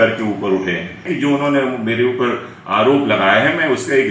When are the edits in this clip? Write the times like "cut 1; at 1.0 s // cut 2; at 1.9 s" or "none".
cut 1; at 1.0 s